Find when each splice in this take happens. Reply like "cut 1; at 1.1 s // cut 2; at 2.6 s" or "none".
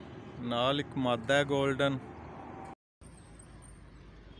cut 1; at 2.7 s